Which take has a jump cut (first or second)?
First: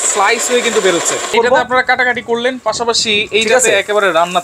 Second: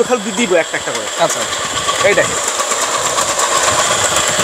first